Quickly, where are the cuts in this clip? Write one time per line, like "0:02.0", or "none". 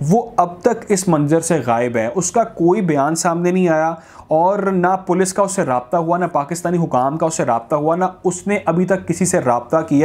none